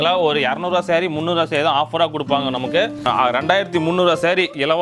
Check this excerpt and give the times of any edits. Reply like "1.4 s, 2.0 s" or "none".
3.0 s